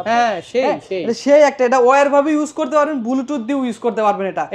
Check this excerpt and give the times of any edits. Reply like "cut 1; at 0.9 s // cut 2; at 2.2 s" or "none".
none